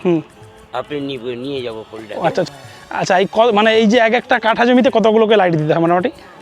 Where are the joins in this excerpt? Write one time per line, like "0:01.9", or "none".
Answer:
0:02.5